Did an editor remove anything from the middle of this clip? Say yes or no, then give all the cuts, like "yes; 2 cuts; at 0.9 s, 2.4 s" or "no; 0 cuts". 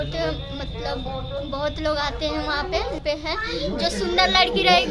yes; 1 cut; at 3.0 s